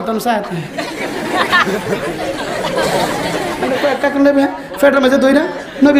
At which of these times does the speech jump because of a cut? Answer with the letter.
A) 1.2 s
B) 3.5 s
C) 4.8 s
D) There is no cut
B